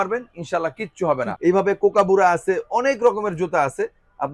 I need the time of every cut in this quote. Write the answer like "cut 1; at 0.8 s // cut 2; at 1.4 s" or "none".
cut 1; at 1.3 s